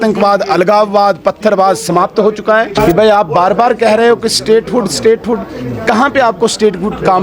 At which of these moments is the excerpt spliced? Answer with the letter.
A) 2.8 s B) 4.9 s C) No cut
A